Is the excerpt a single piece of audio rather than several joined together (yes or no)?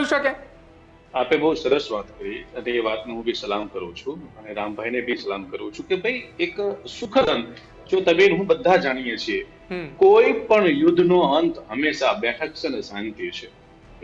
yes